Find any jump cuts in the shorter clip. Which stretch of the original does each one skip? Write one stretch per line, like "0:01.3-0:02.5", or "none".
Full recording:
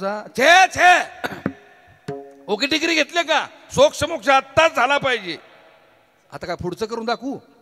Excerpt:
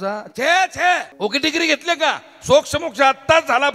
0:01.1-0:02.4